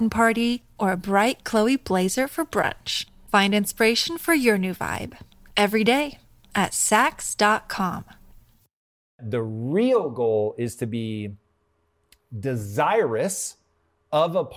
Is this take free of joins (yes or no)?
no